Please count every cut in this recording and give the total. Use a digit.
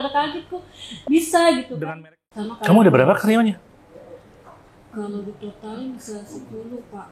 1